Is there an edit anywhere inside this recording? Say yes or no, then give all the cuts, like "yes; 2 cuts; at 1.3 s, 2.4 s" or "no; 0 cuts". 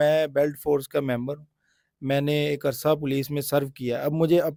no; 0 cuts